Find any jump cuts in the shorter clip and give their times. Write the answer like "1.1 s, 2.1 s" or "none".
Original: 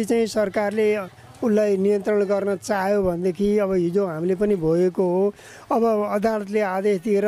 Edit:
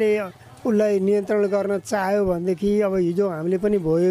none

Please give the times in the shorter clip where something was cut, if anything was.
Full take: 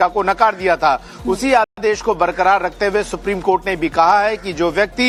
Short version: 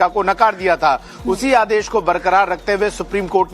1.7 s

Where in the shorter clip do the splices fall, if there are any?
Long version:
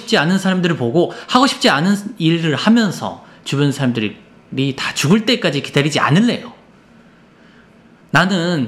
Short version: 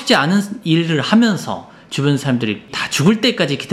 2.8 s

